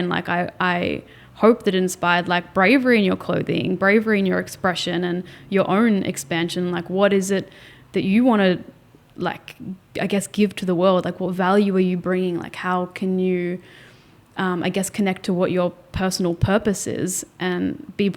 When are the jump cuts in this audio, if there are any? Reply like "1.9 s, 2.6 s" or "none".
none